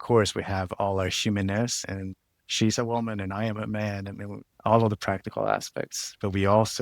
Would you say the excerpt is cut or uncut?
cut